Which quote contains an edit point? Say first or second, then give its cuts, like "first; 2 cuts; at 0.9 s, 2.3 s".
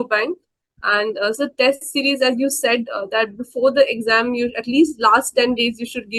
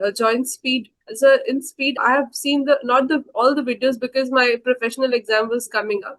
second; 2 cuts; at 1.0 s, 2.0 s